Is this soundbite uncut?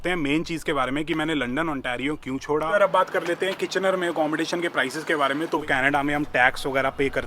no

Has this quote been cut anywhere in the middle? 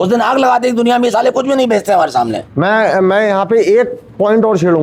no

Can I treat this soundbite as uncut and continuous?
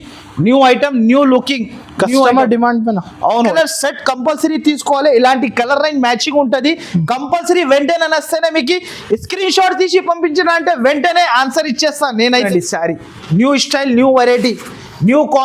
no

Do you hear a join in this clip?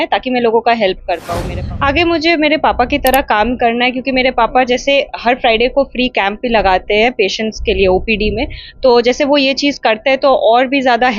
yes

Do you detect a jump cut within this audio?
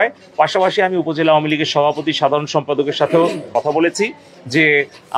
yes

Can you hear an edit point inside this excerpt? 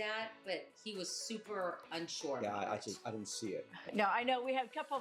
yes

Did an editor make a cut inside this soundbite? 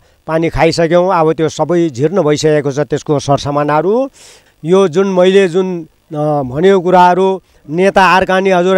yes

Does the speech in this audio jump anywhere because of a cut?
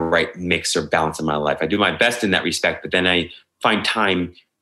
no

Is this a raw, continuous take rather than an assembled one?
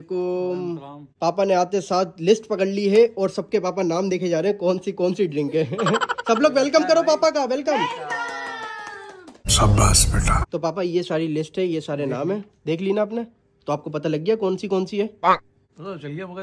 yes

